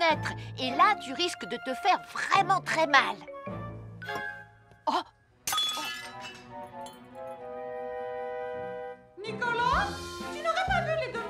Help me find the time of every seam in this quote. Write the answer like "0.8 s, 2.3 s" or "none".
none